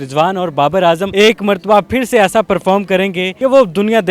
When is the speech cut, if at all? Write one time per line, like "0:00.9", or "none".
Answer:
none